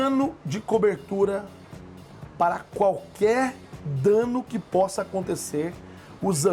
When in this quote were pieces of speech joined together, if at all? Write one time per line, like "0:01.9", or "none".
none